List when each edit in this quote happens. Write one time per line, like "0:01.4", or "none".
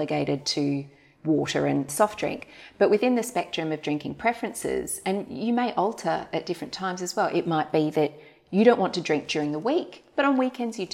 0:01.9